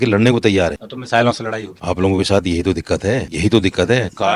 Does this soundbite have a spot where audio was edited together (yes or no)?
yes